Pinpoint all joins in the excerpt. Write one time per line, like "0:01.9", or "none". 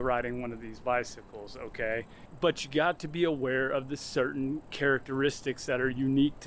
0:02.2